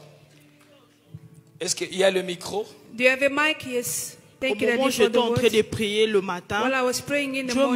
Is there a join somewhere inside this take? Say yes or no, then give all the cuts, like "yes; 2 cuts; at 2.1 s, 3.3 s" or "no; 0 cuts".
yes; 1 cut; at 4.4 s